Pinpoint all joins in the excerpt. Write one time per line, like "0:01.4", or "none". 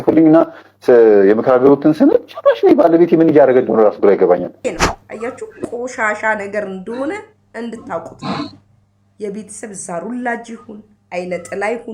0:04.6